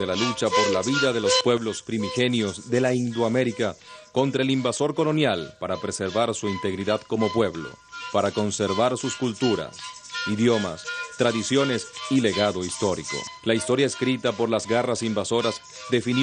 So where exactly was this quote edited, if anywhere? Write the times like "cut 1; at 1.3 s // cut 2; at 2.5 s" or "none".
cut 1; at 4.3 s